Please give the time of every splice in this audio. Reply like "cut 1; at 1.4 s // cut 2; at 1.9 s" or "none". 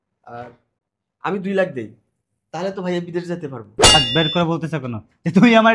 cut 1; at 3.9 s